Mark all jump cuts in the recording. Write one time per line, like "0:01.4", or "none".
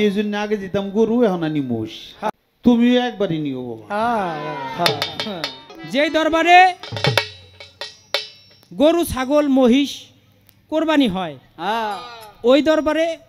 0:02.3
0:05.7